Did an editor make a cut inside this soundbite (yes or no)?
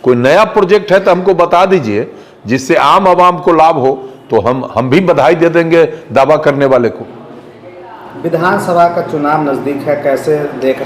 no